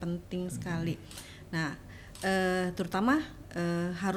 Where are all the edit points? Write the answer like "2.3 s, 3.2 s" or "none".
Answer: none